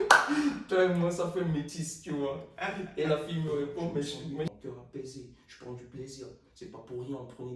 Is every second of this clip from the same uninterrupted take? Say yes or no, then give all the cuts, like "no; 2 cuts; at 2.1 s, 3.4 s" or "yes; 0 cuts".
no; 1 cut; at 4.5 s